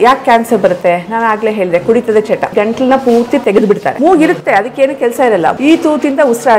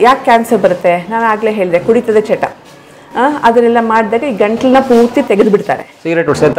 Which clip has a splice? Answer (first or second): first